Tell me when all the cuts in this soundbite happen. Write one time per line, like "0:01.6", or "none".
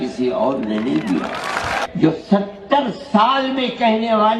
0:01.8